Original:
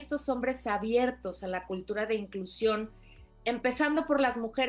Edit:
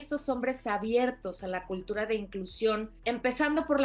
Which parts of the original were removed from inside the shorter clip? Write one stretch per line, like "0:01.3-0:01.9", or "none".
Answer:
0:02.9-0:03.3

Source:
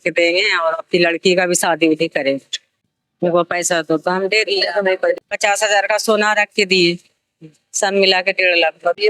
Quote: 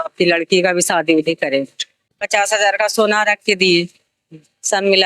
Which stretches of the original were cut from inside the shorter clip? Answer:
0:02.9-0:05.3

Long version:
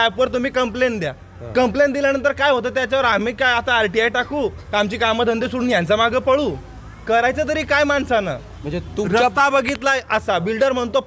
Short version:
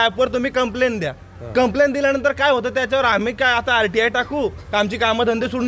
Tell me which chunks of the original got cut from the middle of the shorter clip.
none

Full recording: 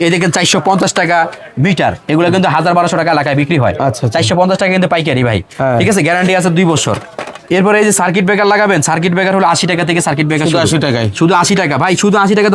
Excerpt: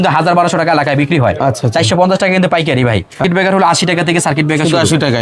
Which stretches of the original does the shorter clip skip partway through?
0:05.6-0:09.0

